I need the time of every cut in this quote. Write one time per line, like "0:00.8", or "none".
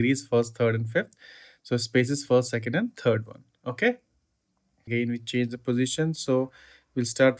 0:04.9